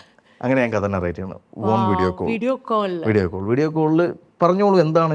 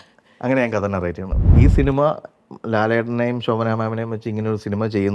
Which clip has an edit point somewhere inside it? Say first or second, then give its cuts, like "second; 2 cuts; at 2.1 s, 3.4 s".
second; 1 cut; at 1.5 s